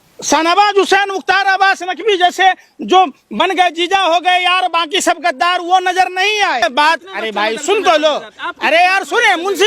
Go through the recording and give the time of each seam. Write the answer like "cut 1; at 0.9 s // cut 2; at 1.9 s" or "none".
cut 1; at 6.6 s